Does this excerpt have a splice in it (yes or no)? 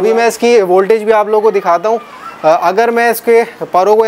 no